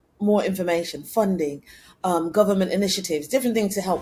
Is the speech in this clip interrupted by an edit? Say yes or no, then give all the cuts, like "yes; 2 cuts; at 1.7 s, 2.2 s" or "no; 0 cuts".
no; 0 cuts